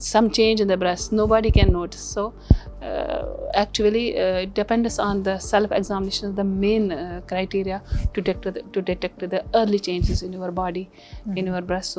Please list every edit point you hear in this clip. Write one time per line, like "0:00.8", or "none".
none